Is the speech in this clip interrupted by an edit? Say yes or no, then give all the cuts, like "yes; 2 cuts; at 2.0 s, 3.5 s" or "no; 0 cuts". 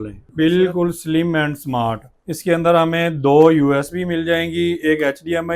yes; 1 cut; at 2.1 s